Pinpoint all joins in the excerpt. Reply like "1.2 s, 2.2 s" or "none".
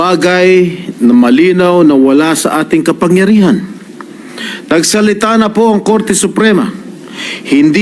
none

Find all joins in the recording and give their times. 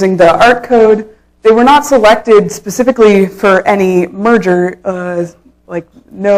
4.1 s

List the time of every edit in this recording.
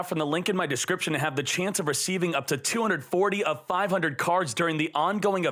none

